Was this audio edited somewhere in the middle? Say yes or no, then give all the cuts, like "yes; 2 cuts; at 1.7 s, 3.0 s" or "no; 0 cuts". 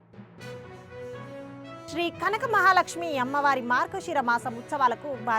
no; 0 cuts